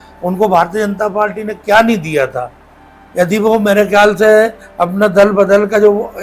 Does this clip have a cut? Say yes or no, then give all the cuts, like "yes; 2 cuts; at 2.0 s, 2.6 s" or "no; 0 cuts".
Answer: no; 0 cuts